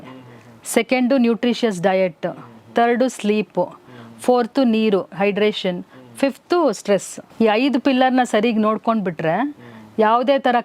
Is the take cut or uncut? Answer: cut